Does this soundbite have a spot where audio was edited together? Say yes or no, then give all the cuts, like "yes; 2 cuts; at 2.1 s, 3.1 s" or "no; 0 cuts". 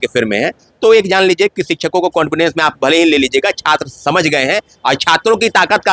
no; 0 cuts